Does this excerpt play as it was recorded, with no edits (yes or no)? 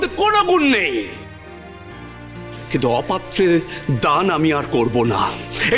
no